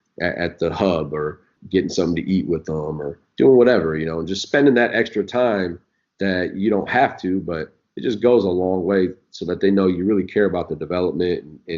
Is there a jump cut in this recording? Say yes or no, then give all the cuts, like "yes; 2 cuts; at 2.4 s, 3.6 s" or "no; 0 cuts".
yes; 1 cut; at 1.5 s